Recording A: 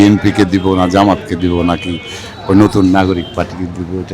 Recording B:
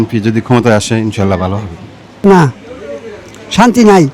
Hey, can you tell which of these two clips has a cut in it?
B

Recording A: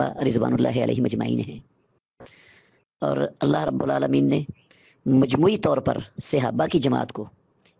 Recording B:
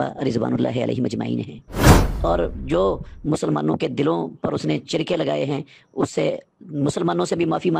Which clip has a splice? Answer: B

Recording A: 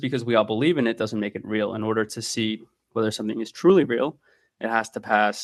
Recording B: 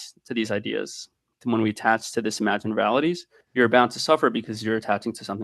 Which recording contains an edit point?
B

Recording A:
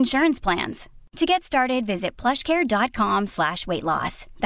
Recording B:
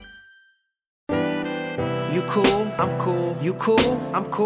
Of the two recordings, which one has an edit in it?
B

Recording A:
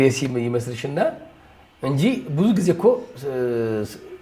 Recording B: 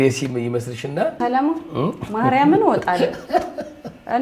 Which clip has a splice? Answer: B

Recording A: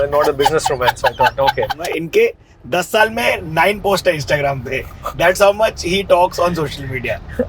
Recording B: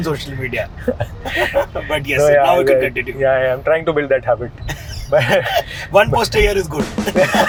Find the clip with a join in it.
A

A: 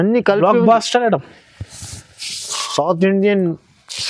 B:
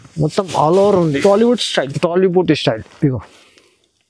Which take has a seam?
A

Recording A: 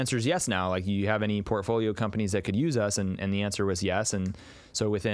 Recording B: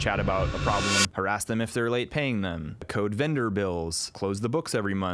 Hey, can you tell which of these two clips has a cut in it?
B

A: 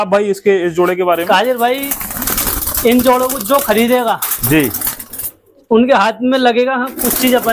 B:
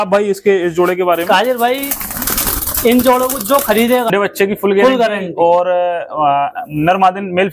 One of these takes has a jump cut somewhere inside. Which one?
B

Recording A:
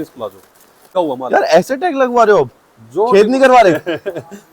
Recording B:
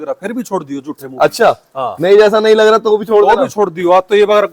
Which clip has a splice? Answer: A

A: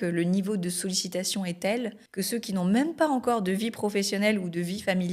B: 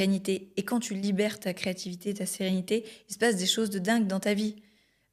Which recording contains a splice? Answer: A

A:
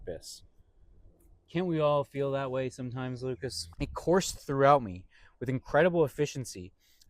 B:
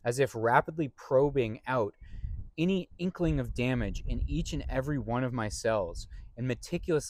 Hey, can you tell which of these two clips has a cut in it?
A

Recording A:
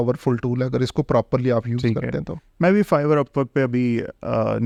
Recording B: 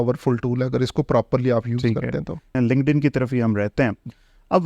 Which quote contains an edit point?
B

